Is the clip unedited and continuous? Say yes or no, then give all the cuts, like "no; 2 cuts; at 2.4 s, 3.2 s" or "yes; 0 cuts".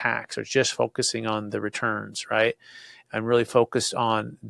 yes; 0 cuts